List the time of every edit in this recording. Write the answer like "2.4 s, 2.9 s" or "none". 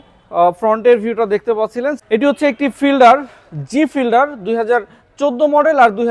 2.0 s